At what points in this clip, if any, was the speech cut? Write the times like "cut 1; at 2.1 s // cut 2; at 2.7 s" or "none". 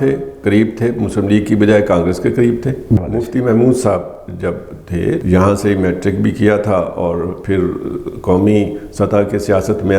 cut 1; at 3.0 s // cut 2; at 5.2 s